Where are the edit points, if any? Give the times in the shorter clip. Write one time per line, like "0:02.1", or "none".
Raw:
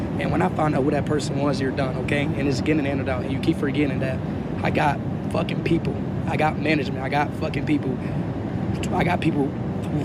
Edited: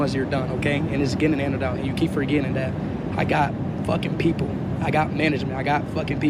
none